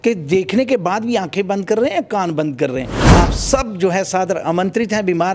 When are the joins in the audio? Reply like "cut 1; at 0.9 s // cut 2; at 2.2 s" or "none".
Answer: cut 1; at 3.0 s